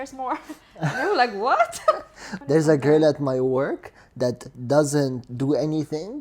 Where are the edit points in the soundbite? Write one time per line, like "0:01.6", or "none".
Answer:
0:02.2